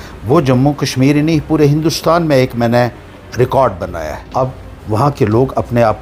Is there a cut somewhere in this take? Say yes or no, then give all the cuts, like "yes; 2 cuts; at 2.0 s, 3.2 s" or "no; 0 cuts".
yes; 1 cut; at 4.2 s